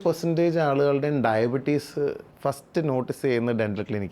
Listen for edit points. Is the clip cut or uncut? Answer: cut